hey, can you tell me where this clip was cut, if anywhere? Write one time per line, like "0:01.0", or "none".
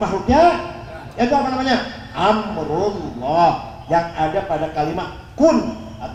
none